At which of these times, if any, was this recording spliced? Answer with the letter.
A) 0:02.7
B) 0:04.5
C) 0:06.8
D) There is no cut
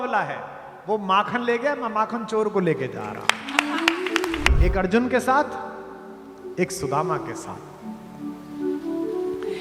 B